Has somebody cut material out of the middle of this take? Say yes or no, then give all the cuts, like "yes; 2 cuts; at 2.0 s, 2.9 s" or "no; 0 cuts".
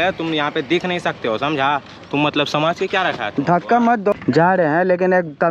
yes; 1 cut; at 4.1 s